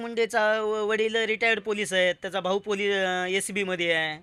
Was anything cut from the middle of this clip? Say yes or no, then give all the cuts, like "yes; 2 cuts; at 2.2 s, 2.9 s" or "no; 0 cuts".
no; 0 cuts